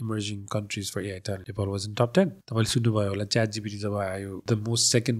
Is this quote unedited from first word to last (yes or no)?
no